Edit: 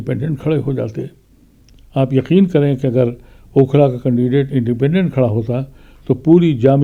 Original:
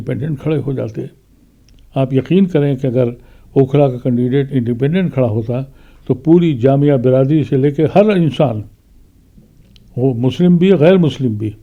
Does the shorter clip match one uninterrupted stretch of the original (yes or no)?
yes